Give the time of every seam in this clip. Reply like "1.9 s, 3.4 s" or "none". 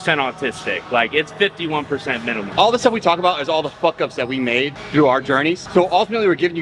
2.5 s, 5.6 s